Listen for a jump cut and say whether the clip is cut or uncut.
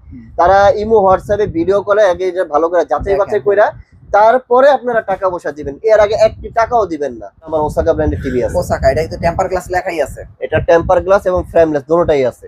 cut